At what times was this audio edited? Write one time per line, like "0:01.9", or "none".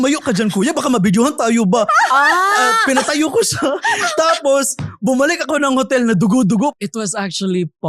0:06.8